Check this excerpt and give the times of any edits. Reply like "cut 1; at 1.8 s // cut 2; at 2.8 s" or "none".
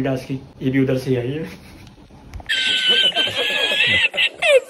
none